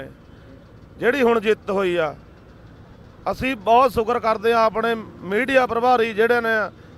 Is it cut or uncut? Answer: uncut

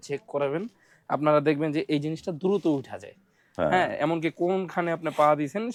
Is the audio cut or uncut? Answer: uncut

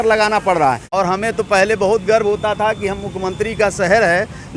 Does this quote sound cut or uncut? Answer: cut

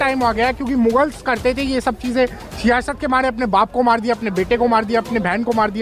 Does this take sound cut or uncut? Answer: uncut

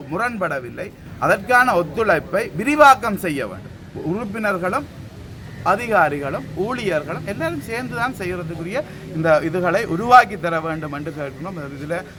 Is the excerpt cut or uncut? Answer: uncut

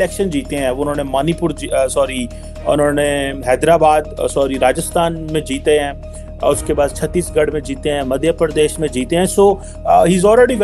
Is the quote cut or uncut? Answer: uncut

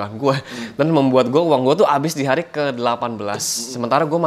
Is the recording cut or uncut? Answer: uncut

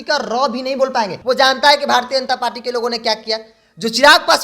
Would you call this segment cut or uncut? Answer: cut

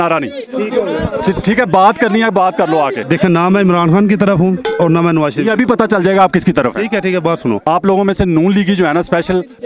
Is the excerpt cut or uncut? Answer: cut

